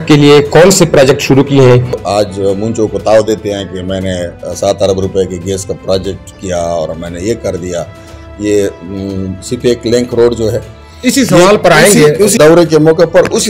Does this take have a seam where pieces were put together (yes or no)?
yes